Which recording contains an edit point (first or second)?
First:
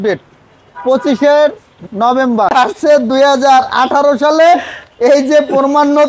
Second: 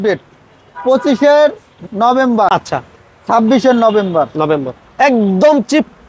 first